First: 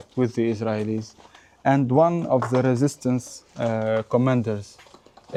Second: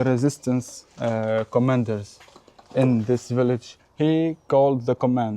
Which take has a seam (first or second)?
second